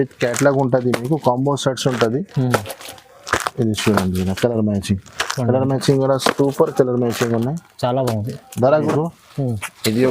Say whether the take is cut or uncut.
cut